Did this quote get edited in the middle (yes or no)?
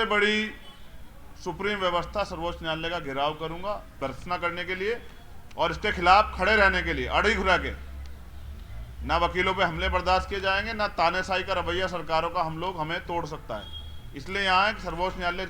yes